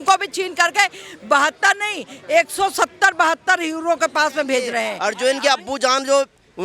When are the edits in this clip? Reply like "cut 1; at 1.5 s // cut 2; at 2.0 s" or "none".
cut 1; at 4.9 s